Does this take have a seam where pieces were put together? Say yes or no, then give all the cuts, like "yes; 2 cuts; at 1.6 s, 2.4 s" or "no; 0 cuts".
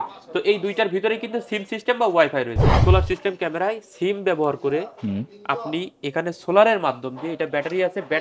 yes; 1 cut; at 2.7 s